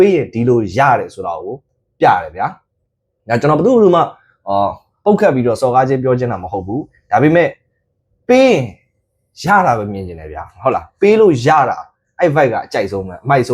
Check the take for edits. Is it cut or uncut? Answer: uncut